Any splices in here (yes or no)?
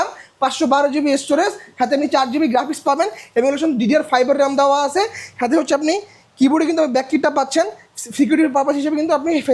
no